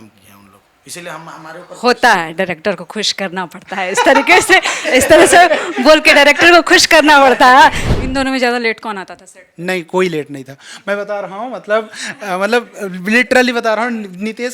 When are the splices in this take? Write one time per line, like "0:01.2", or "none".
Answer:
0:07.8